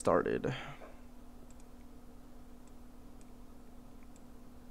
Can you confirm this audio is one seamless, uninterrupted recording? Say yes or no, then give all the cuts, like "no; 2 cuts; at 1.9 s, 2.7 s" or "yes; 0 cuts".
yes; 0 cuts